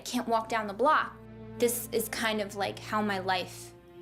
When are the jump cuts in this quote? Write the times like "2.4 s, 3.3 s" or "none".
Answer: 1.3 s